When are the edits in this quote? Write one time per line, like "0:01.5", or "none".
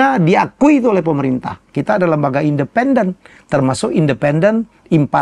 0:01.7

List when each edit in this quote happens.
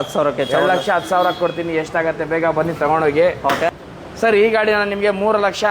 0:03.8

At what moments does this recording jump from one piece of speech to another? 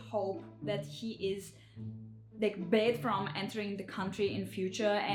none

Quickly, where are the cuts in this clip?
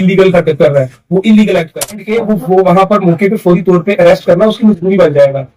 0:02.1

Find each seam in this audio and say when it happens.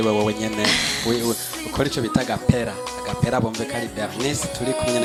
none

